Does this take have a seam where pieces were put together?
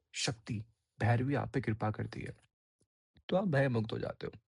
no; 0 cuts

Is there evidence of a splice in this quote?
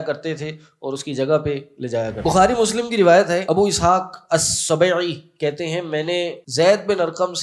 yes; 3 cuts; at 2.2 s, 3.4 s, 6.4 s

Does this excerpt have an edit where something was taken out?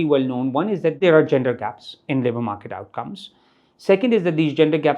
yes; 1 cut; at 1.0 s

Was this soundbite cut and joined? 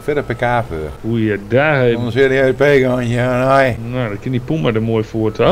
yes; 2 cuts; at 0.9 s, 3.8 s

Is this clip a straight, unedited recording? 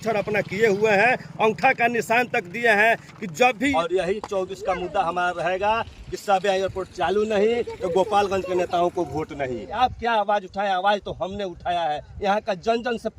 no; 2 cuts; at 3.7 s, 9.8 s

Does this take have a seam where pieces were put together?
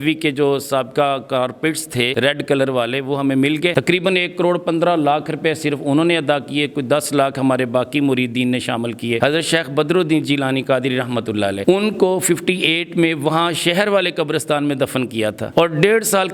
yes; 2 cuts; at 3.7 s, 9.2 s

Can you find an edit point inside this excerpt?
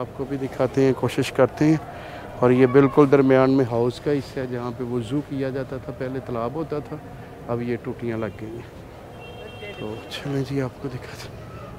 no; 0 cuts

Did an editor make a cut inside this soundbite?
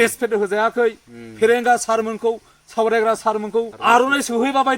yes; 1 cut; at 3.7 s

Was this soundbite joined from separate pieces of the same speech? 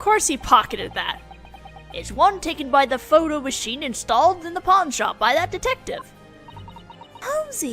no; 0 cuts

